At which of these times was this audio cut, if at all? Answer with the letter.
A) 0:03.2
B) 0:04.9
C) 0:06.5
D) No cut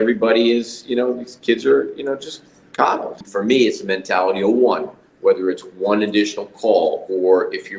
A